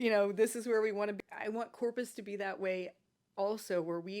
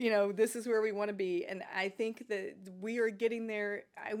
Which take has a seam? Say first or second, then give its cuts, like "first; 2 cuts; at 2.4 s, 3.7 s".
first; 1 cut; at 1.2 s